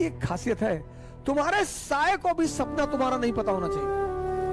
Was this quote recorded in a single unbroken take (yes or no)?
no